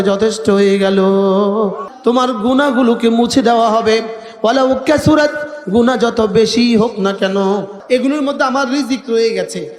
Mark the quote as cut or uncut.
cut